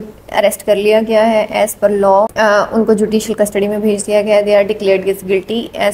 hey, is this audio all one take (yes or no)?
yes